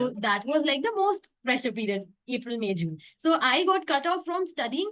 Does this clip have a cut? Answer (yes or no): no